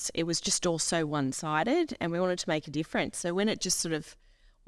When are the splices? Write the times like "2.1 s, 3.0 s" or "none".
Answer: none